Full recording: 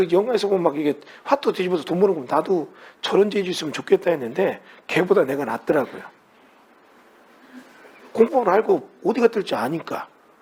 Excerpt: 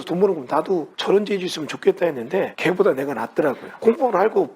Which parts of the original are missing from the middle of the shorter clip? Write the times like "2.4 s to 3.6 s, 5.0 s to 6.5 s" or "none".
2.7 s to 3.0 s, 4.6 s to 4.8 s, 6.0 s to 8.0 s